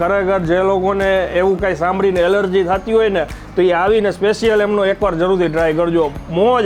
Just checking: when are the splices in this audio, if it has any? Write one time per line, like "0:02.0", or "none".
none